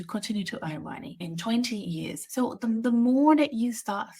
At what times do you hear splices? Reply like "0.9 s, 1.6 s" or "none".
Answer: 1.2 s, 2.2 s